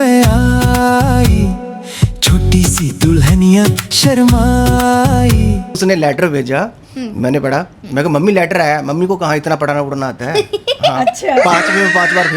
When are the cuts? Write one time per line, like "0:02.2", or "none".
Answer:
0:05.8